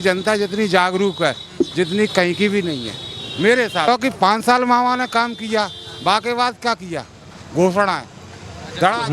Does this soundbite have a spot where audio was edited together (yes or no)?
yes